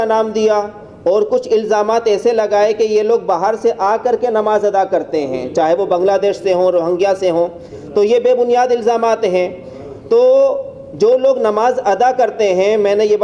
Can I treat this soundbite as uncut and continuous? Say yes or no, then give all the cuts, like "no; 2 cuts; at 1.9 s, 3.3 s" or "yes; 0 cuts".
yes; 0 cuts